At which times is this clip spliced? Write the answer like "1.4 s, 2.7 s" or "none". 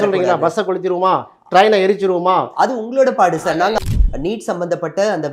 3.8 s